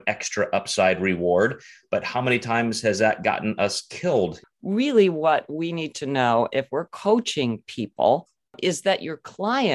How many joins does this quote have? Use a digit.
2